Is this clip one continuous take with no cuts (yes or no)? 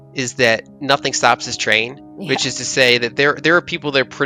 yes